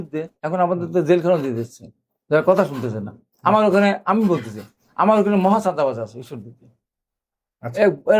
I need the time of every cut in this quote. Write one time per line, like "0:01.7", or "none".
none